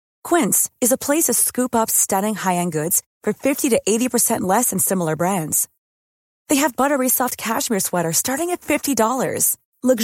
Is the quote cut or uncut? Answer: uncut